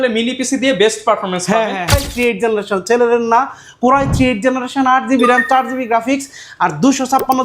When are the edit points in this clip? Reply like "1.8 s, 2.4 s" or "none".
2.0 s

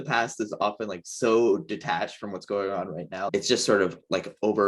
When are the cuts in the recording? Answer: 3.3 s

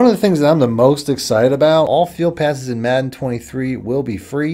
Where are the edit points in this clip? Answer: 1.9 s

